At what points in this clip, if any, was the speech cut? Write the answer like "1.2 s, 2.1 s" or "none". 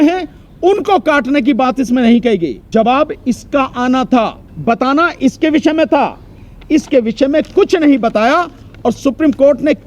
2.7 s, 4.5 s